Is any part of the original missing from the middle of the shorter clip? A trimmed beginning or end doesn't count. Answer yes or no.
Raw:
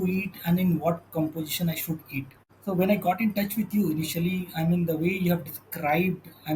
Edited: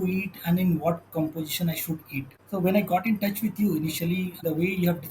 yes